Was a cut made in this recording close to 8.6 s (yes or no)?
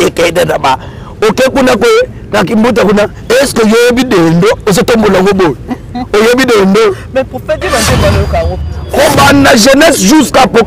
yes